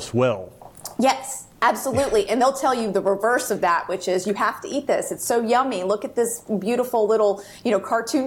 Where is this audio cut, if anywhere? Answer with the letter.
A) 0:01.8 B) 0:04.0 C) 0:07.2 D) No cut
D